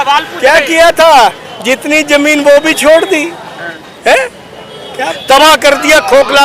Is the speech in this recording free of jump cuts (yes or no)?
no